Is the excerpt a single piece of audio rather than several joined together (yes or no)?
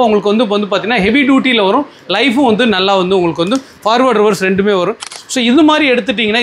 no